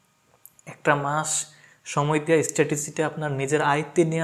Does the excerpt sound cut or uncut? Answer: uncut